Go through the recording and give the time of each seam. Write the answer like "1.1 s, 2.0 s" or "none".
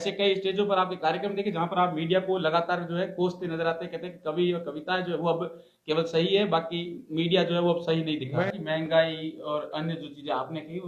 8.5 s